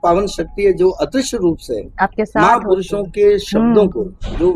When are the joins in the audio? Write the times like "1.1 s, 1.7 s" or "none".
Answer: none